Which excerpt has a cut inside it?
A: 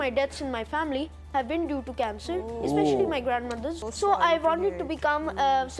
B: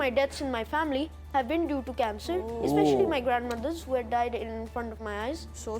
A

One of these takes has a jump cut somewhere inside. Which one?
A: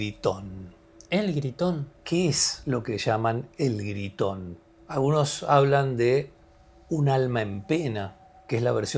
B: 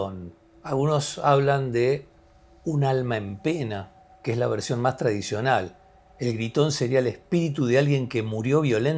A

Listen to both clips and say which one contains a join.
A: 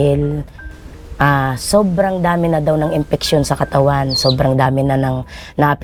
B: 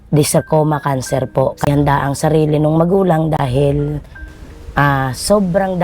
B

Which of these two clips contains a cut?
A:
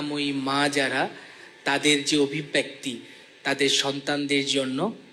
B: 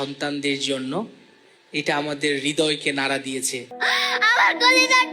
B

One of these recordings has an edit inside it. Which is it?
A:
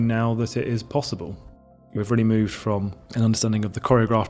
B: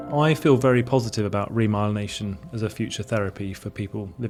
A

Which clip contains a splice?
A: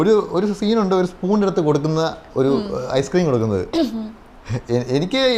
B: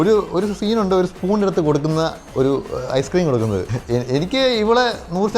B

